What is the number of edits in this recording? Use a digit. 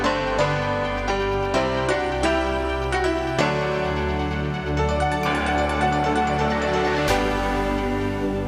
0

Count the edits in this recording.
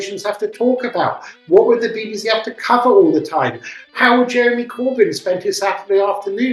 1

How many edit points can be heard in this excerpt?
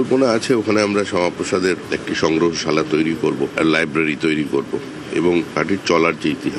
1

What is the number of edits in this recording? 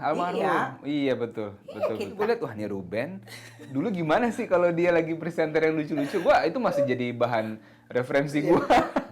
1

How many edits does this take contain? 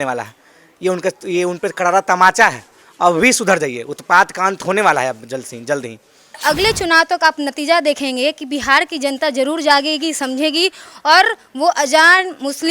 1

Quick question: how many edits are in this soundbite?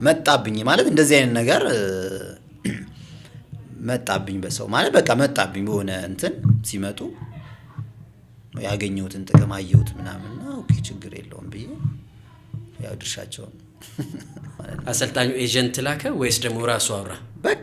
1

